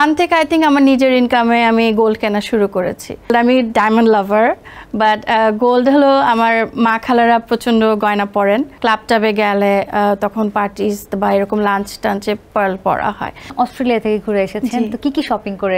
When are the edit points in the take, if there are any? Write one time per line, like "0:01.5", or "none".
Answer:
0:03.3
0:08.7
0:13.5